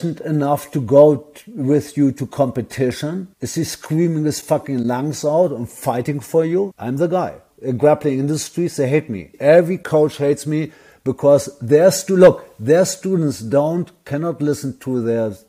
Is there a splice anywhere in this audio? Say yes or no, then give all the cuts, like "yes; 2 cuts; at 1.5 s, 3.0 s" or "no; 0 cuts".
no; 0 cuts